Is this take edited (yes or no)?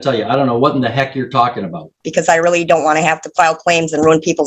yes